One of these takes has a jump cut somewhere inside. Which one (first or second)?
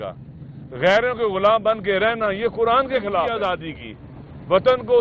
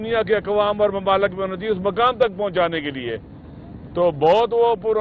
first